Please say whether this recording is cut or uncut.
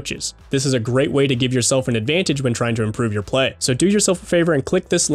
cut